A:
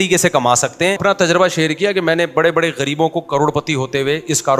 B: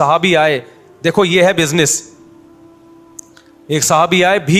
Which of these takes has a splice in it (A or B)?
A